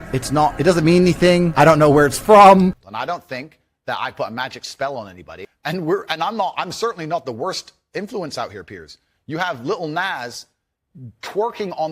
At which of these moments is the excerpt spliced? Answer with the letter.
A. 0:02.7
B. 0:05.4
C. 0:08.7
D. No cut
A